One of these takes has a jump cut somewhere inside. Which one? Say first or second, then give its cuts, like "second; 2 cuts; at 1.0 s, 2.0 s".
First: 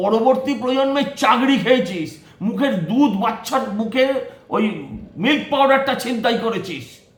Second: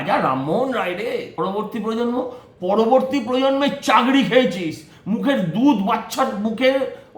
second; 1 cut; at 1.4 s